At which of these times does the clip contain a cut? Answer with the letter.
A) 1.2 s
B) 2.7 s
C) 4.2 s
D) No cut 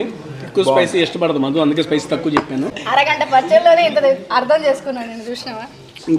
B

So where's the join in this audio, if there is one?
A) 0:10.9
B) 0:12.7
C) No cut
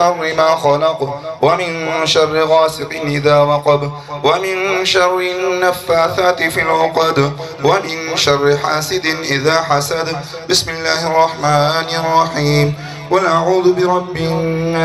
C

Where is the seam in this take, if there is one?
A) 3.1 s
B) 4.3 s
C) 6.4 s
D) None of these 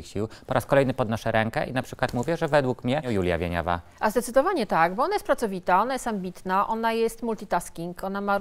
A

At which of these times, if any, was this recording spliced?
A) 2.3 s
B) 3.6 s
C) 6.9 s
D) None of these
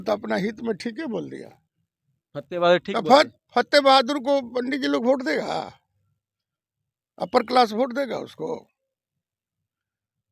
D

